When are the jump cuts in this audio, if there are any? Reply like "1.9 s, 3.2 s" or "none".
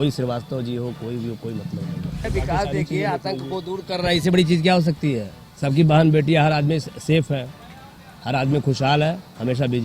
2.3 s